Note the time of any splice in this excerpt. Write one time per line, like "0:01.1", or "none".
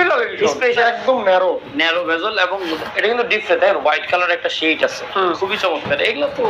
0:00.8
0:05.4